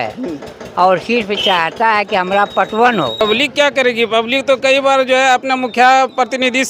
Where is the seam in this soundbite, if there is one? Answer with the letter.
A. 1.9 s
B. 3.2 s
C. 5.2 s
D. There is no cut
B